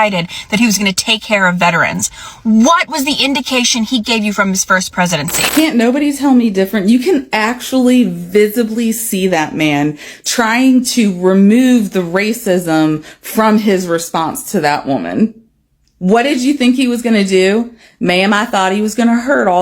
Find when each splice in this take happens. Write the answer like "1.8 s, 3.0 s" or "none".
5.4 s